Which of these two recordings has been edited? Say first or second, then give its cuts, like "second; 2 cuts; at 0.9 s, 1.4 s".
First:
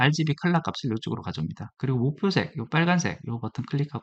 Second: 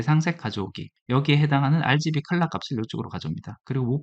second; 1 cut; at 0.9 s